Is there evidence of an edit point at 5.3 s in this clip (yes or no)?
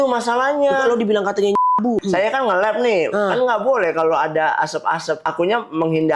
yes